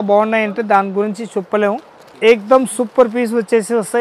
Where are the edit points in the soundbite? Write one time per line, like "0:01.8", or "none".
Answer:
0:02.0